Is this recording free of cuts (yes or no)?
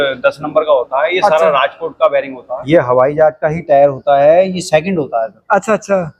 no